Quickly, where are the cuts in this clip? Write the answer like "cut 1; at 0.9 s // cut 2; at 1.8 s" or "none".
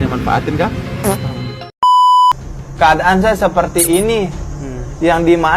cut 1; at 1.7 s // cut 2; at 2.3 s